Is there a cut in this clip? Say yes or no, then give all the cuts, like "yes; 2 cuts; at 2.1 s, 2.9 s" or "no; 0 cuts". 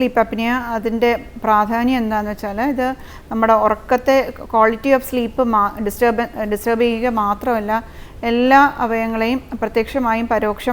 no; 0 cuts